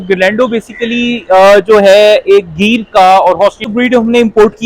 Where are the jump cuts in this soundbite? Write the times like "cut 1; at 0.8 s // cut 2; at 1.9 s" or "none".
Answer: cut 1; at 3.6 s